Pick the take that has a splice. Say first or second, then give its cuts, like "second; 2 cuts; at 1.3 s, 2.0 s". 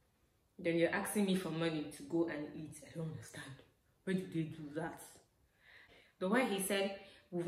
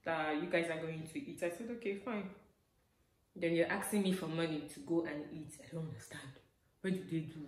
first; 1 cut; at 5.9 s